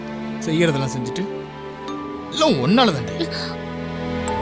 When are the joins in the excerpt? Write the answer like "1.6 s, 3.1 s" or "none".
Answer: none